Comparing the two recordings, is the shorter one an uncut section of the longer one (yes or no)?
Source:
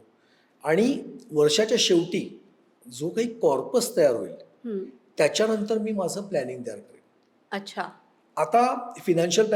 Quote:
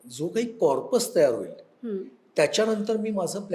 yes